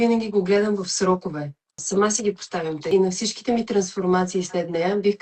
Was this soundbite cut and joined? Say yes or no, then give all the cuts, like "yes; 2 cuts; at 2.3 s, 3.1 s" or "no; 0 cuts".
yes; 2 cuts; at 1.8 s, 2.9 s